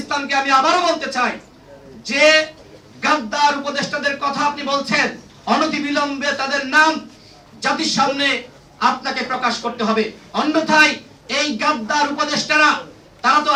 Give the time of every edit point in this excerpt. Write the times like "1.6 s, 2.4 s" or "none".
none